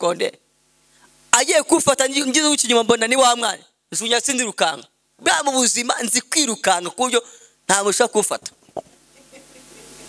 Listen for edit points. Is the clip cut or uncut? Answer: uncut